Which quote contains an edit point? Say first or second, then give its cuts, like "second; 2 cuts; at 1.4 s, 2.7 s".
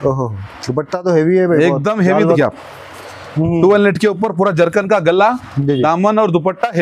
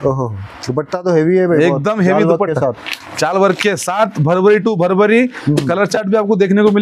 first; 1 cut; at 2.4 s